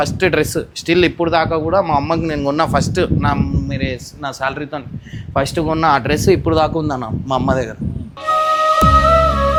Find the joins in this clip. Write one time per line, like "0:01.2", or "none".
none